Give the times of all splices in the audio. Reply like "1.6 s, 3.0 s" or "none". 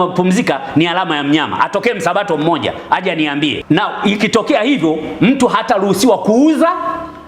3.6 s